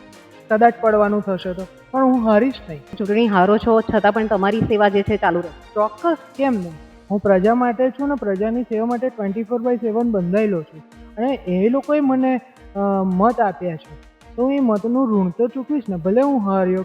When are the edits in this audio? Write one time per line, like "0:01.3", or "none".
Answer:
0:03.0